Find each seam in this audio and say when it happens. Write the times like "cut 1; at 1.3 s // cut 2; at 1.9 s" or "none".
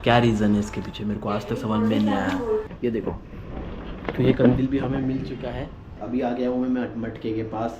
cut 1; at 2.7 s // cut 2; at 6.0 s